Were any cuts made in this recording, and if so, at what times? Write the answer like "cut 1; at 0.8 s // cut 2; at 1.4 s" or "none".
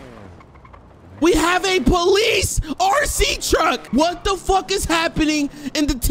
cut 1; at 3.9 s